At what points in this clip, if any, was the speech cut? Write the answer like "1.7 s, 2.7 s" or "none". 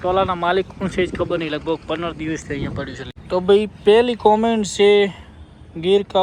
3.0 s